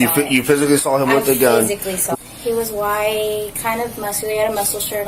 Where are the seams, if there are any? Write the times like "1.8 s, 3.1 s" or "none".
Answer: 2.0 s